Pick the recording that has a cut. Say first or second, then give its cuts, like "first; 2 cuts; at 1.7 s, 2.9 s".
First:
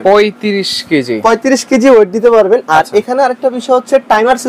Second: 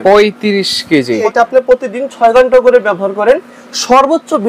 second; 1 cut; at 1.2 s